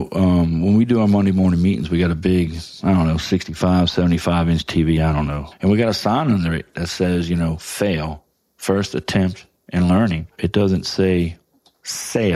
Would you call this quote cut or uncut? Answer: cut